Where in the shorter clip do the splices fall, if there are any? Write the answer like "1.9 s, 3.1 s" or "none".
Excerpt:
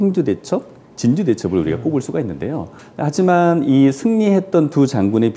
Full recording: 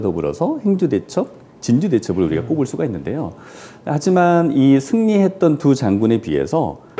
2.8 s